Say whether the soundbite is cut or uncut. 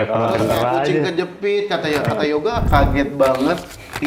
cut